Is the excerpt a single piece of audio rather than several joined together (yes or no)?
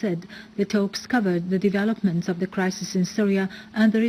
yes